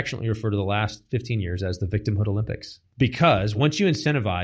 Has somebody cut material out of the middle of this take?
yes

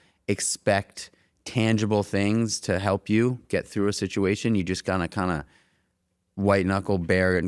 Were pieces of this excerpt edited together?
no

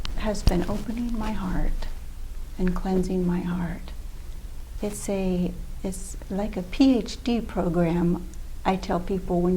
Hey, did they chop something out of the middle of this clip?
no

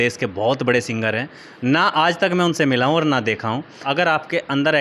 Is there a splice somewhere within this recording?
yes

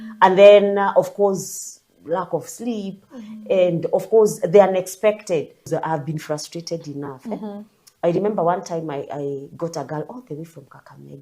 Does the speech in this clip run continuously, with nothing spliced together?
no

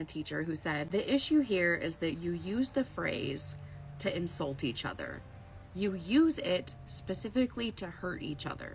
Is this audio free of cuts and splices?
yes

